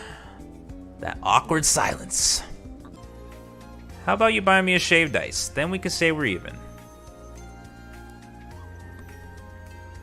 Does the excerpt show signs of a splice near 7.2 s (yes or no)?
no